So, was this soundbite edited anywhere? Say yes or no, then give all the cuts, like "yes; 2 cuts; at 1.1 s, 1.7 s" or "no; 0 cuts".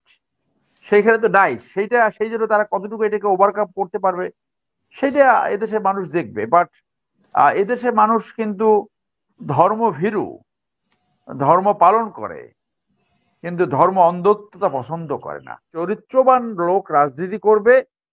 yes; 1 cut; at 15.7 s